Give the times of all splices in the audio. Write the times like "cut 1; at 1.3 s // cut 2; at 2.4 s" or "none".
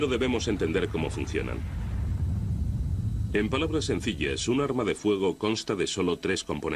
cut 1; at 2.1 s